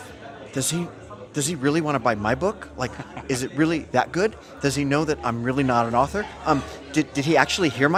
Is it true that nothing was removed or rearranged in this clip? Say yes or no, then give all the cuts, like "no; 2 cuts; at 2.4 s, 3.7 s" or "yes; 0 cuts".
yes; 0 cuts